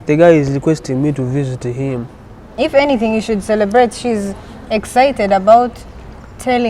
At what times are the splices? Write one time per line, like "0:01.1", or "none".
0:02.5